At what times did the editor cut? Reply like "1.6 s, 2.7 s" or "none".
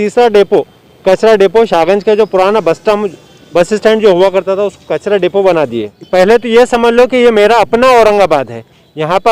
6.0 s